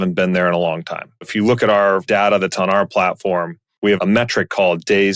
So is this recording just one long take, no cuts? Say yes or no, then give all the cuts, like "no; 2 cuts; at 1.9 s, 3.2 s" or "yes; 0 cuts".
no; 1 cut; at 4.0 s